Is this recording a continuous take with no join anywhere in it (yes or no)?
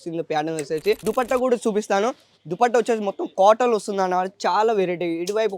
no